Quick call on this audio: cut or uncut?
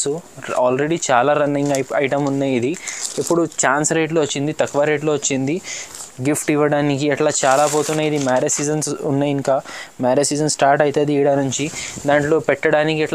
uncut